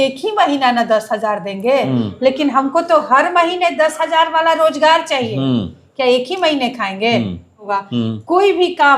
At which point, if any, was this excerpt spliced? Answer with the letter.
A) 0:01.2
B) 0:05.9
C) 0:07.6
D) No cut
C